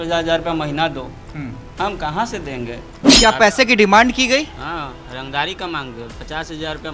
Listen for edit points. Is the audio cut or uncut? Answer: cut